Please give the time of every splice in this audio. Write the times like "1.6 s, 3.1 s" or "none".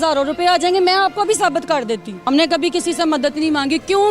2.1 s